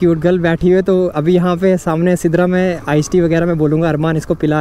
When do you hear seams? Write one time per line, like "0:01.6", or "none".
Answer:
none